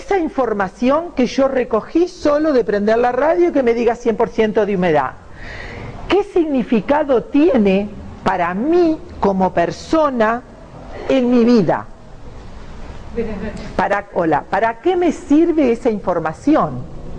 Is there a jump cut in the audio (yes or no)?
no